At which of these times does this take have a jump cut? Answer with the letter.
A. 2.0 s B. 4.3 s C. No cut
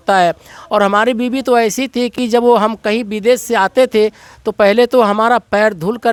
C